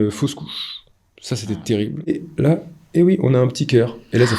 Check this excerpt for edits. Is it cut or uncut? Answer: cut